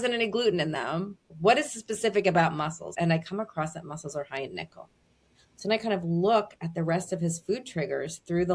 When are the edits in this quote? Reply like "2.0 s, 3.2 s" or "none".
1.3 s, 2.9 s